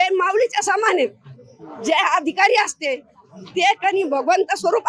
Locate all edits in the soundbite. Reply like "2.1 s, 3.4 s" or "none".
none